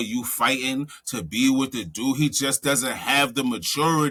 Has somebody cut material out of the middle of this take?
no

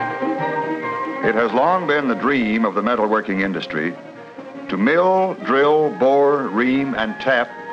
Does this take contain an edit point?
yes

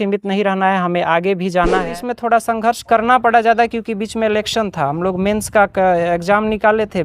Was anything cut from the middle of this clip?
yes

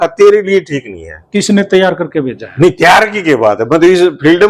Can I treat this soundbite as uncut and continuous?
no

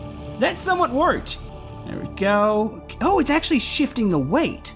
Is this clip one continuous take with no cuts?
no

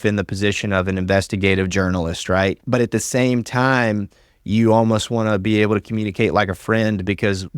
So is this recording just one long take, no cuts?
no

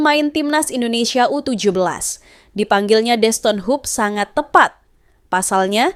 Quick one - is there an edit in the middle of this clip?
no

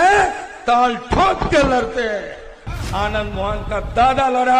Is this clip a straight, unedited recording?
no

